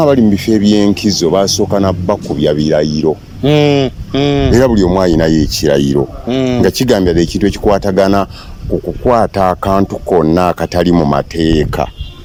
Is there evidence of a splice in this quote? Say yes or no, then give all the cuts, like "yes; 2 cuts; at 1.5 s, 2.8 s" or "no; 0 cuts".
no; 0 cuts